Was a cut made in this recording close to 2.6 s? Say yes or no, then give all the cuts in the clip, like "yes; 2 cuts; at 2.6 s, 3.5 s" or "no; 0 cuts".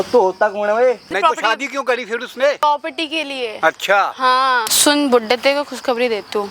yes; 3 cuts; at 1.1 s, 2.6 s, 4.7 s